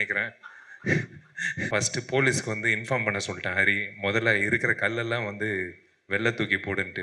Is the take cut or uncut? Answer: cut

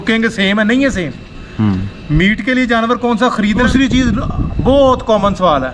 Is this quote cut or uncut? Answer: cut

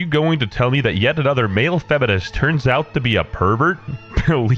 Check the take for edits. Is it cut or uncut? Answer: cut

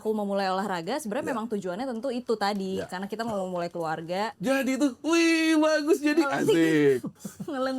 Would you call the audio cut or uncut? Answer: cut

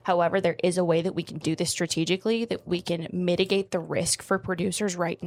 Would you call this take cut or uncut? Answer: uncut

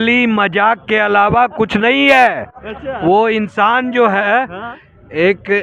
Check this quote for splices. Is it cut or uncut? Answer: uncut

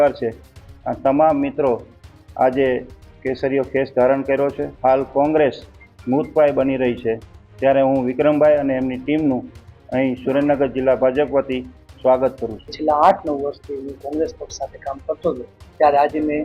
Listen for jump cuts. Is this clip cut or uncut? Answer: cut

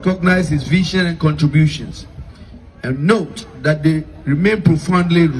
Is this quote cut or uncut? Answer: uncut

